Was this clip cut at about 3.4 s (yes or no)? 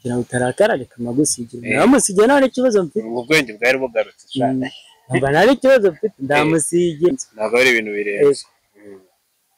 no